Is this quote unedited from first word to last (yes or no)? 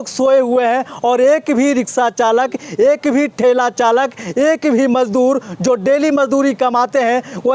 yes